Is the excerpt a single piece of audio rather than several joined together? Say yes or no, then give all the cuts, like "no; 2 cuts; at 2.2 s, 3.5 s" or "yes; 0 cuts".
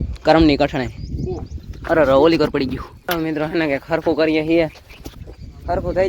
no; 1 cut; at 3.1 s